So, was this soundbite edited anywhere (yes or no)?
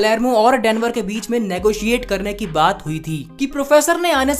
yes